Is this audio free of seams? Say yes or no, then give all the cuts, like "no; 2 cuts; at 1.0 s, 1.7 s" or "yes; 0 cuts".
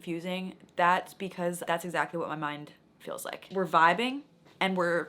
no; 2 cuts; at 1.6 s, 3.3 s